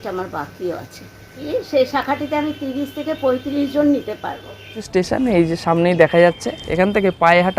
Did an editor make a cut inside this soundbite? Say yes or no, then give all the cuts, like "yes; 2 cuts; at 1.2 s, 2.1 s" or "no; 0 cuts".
yes; 2 cuts; at 1.5 s, 4.8 s